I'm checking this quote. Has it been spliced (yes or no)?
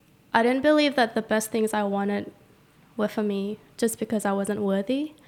no